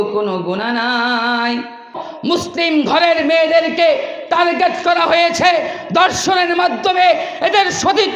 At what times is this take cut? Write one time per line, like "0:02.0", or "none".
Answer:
0:02.1